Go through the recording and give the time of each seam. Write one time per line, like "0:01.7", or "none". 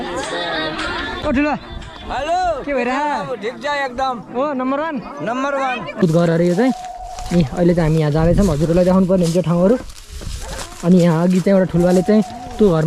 0:01.2
0:06.0